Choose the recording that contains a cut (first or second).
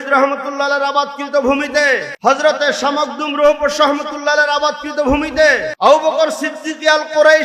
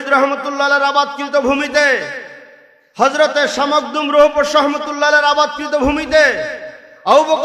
first